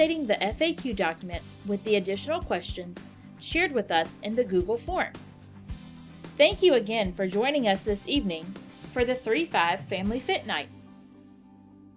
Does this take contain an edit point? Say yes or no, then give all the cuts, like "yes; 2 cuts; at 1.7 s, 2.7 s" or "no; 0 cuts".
yes; 1 cut; at 10.7 s